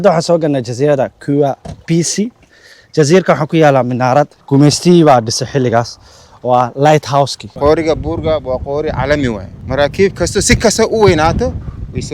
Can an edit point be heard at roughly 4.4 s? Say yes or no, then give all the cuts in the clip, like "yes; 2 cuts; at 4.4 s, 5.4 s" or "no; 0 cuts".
yes; 3 cuts; at 4.4 s, 7.4 s, 9.5 s